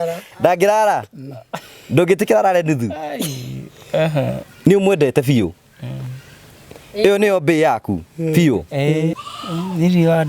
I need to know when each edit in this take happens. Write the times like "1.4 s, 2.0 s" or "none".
9.2 s